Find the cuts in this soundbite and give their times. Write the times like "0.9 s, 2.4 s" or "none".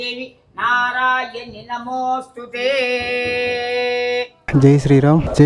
4.4 s